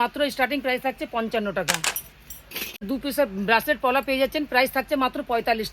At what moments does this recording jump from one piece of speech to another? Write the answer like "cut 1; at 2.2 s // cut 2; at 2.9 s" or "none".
cut 1; at 2.9 s